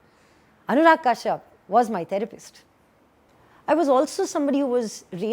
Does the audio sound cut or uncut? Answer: cut